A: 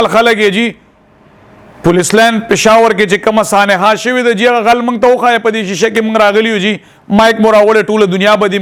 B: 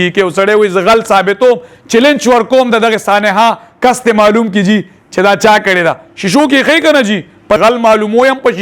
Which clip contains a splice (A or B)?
B